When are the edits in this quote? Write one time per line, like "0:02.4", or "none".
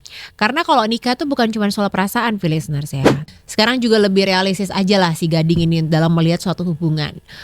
0:03.2